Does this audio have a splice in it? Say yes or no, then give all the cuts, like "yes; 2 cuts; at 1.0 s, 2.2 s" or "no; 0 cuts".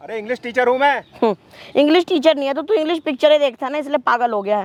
no; 0 cuts